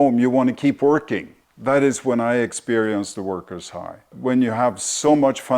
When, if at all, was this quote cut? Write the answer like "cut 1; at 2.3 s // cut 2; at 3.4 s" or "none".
cut 1; at 4.1 s

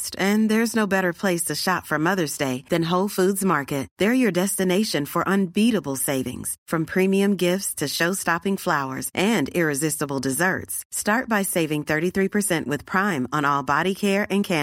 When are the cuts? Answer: none

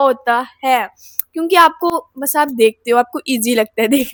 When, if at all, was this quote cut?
none

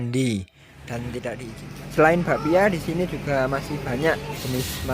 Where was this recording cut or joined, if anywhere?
cut 1; at 1.5 s

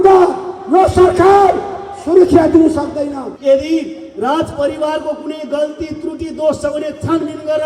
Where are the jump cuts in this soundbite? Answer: cut 1; at 3.3 s

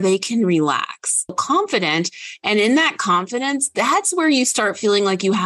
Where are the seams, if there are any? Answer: cut 1; at 1.4 s

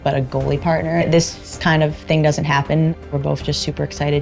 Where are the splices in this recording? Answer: cut 1; at 1.2 s // cut 2; at 3.1 s

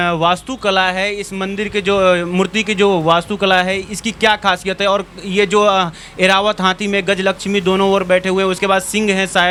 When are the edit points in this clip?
none

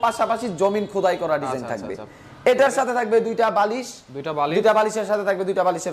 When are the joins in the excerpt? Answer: none

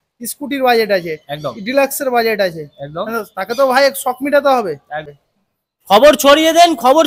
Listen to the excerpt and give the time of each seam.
cut 1; at 5.1 s

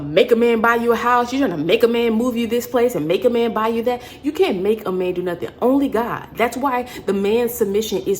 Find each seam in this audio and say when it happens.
none

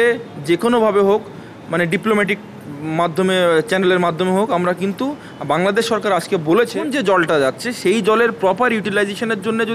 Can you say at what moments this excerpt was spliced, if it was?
cut 1; at 6.9 s

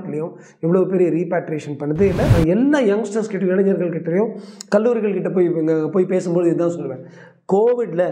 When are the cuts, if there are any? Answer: cut 1; at 2.3 s

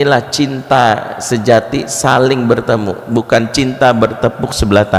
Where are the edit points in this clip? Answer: none

